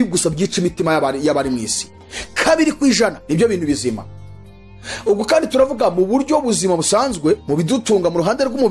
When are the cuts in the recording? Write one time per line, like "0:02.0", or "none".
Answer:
none